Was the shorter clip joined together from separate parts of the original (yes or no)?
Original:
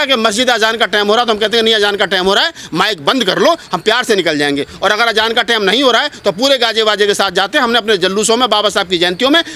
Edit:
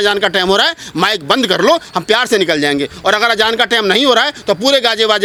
no